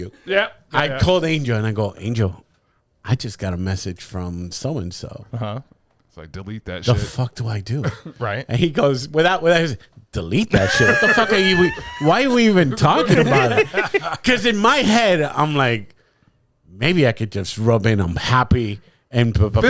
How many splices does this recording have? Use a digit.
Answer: 0